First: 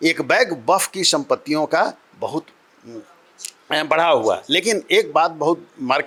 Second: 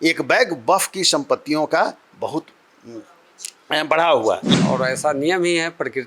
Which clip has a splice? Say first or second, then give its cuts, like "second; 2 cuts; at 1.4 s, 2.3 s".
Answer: second; 1 cut; at 4.4 s